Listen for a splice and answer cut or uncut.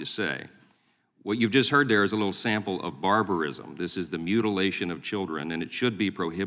uncut